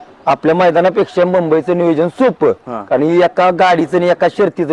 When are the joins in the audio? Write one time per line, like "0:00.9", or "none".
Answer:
none